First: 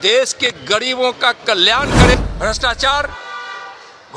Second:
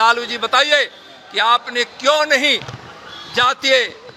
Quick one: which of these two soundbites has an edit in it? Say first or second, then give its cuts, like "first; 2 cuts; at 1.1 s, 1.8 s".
first; 1 cut; at 2.1 s